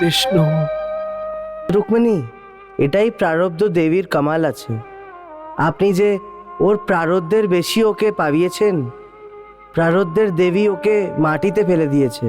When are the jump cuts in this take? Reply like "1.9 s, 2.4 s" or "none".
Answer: 1.7 s